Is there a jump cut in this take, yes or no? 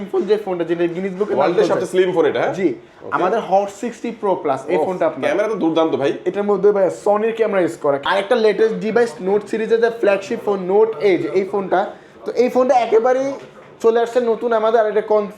yes